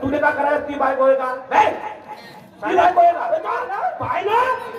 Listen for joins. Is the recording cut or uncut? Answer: cut